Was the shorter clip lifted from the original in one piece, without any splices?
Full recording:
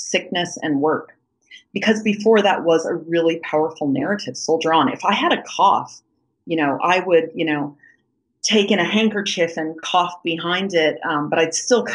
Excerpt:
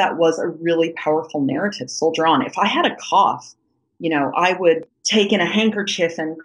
no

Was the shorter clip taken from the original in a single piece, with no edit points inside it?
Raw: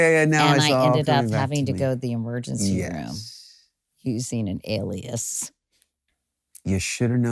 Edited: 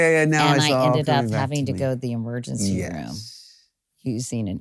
yes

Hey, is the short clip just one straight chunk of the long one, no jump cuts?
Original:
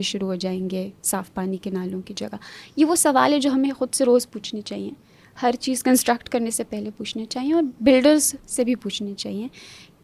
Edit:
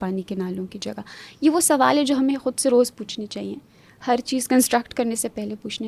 yes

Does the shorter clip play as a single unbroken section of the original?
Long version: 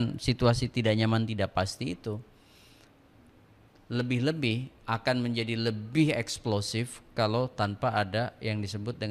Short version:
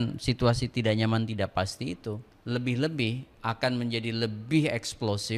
no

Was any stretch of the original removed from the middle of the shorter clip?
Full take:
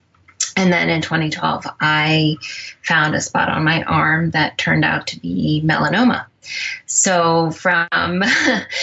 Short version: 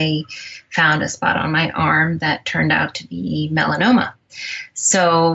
no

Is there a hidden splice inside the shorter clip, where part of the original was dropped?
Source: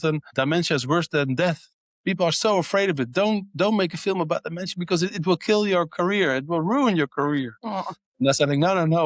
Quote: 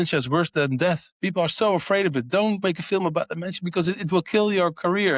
yes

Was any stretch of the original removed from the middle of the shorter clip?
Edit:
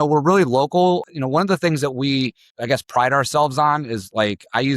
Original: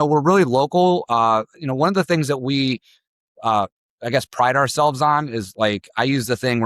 yes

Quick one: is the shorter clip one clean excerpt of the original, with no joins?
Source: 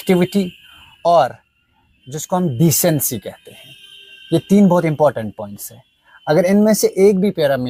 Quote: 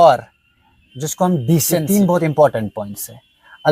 no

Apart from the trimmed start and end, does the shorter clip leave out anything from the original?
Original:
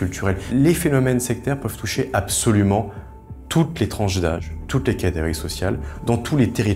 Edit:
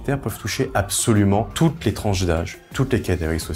yes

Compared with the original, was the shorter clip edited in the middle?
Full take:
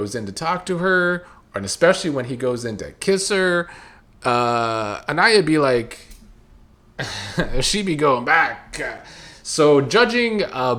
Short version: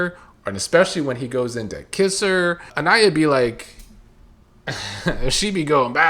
yes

